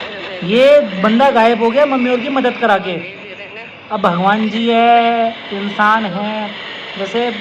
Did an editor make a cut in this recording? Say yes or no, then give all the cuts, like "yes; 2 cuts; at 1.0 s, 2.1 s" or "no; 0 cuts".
no; 0 cuts